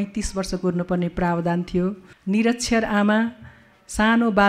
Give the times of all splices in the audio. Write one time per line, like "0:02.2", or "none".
0:02.1